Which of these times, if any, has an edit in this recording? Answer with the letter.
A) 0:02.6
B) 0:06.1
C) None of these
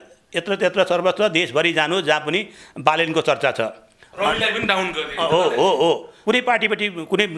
B